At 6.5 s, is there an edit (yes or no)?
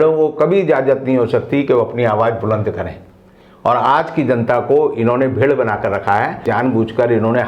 yes